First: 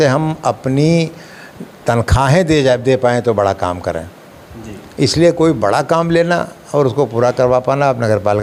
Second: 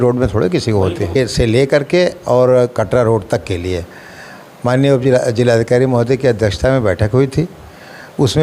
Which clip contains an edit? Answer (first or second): second